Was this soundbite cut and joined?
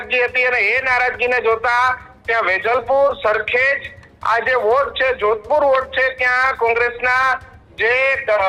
no; 0 cuts

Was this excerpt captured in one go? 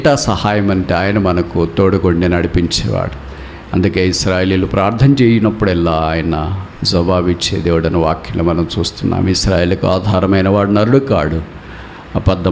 yes; 0 cuts

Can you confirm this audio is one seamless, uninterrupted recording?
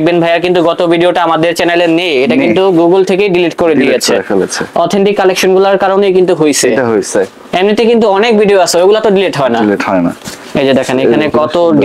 yes; 0 cuts

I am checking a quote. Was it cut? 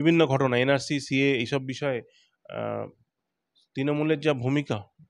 no; 0 cuts

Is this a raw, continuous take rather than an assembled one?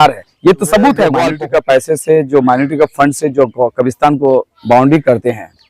no; 1 cut; at 1.4 s

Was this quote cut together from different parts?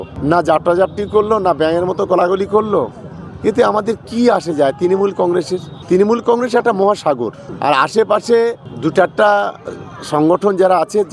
no; 0 cuts

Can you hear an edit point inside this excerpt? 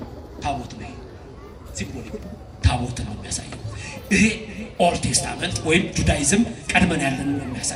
no; 0 cuts

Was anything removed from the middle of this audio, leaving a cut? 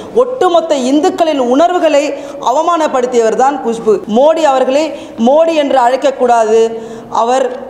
yes; 1 cut; at 4.0 s

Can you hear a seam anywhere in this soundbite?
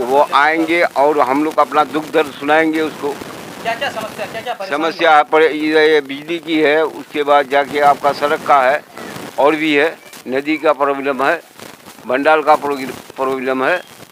no; 0 cuts

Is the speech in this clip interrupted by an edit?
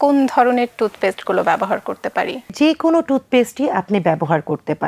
yes; 1 cut; at 2.5 s

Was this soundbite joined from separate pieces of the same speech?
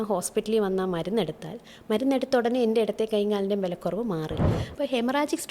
yes; 1 cut; at 4.6 s

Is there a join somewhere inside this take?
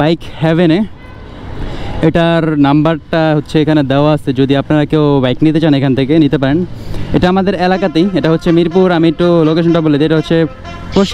no; 0 cuts

